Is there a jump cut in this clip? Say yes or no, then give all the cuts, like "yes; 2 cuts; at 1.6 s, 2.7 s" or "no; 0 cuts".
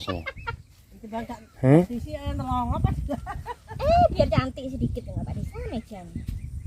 no; 0 cuts